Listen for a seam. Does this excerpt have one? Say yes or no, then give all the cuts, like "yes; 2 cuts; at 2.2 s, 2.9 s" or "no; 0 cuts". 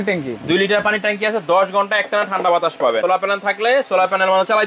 yes; 1 cut; at 3.0 s